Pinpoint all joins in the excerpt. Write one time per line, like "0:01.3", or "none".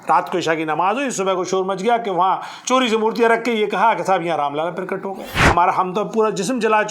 0:05.5